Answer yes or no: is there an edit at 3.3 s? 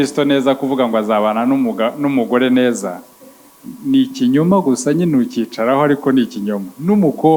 no